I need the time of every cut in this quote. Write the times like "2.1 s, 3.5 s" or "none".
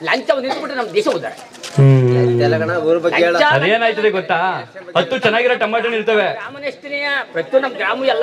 none

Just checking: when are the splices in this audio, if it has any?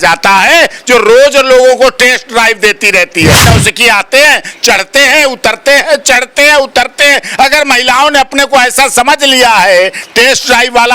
3.4 s

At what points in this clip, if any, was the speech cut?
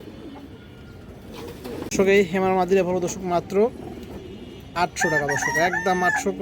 2.0 s

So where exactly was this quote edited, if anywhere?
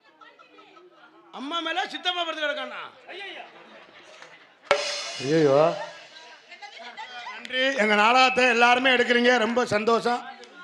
7.3 s

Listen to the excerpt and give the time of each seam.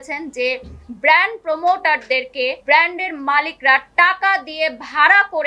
2.6 s

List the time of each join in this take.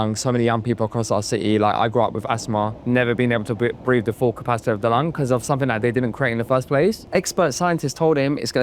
2.8 s, 7.0 s

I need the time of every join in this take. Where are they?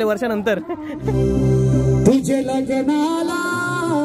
1.1 s

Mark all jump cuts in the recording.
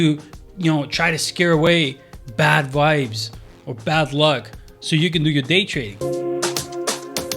5.9 s

